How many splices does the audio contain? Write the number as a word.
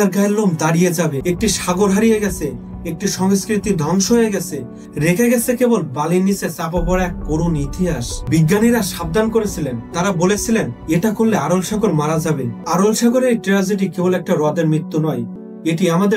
three